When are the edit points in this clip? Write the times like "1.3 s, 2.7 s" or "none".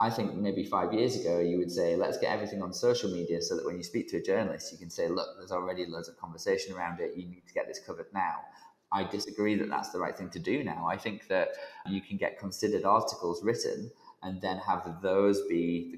11.8 s